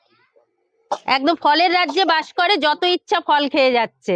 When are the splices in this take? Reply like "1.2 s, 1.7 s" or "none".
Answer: none